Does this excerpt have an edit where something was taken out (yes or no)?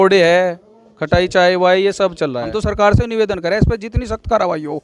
yes